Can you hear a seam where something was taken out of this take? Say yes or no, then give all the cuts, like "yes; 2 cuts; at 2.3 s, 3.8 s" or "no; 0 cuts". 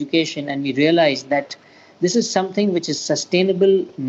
no; 0 cuts